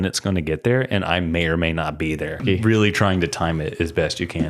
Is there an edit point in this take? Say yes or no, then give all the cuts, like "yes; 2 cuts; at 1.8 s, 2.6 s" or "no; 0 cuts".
yes; 1 cut; at 2.4 s